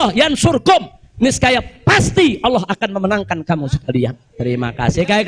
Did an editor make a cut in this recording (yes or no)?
yes